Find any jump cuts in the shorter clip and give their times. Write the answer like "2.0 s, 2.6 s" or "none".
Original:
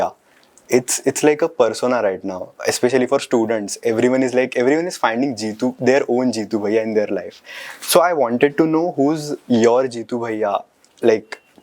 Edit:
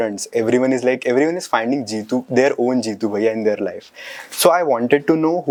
none